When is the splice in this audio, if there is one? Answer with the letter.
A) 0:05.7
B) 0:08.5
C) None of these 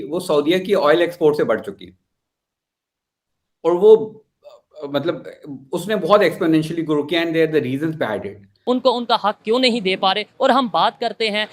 B